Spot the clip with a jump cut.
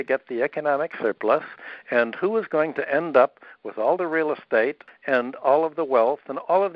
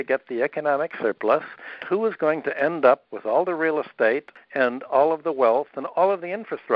second; 2 cuts; at 1.8 s, 3.1 s

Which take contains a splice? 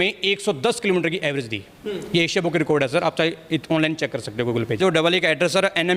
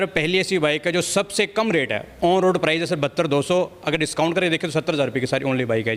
first; 1 cut; at 4.8 s

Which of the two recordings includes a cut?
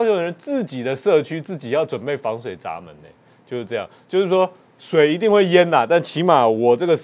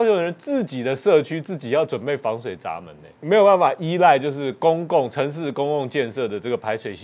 second; 1 cut; at 3.1 s

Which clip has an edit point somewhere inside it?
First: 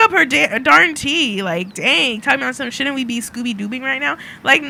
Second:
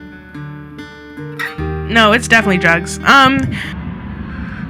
second; 1 cut; at 3.8 s

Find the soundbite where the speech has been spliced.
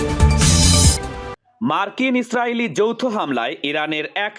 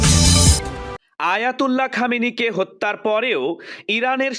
second; 1 cut; at 1.0 s

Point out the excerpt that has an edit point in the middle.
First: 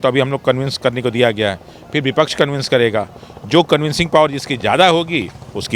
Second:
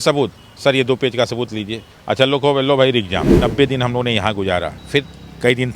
second; 2 cuts; at 3.3 s, 4.8 s

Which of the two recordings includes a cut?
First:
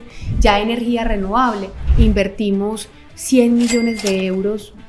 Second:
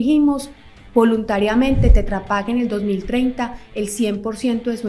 first; 1 cut; at 1.8 s

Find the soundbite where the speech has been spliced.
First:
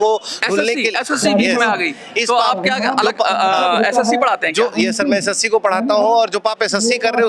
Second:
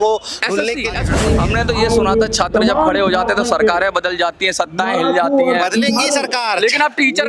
second; 1 cut; at 1.2 s

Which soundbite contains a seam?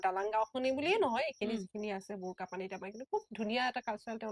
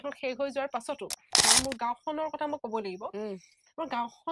second; 1 cut; at 1.4 s

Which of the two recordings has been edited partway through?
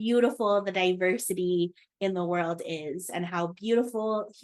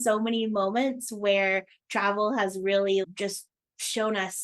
second; 1 cut; at 3.1 s

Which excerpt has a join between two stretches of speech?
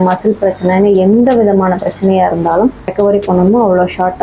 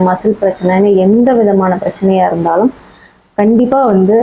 first; 1 cut; at 2.9 s

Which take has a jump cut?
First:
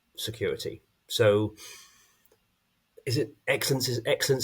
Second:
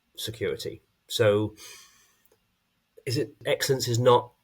second; 1 cut; at 3.4 s

